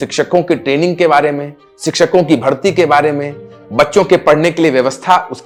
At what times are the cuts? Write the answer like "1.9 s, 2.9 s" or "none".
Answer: none